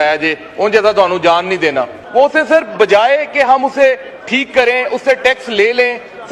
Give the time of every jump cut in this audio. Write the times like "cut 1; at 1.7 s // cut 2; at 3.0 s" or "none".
cut 1; at 2.0 s